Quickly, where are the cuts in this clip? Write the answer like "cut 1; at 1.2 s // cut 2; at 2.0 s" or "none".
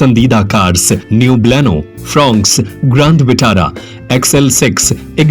cut 1; at 1.0 s